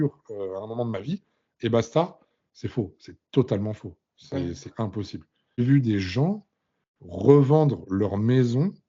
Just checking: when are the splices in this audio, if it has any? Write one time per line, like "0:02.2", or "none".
0:05.6